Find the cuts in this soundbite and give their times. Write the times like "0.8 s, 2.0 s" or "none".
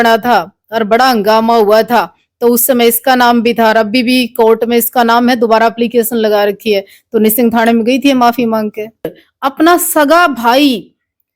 9.2 s